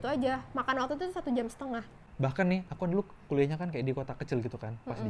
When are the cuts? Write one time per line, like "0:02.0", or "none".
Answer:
0:02.0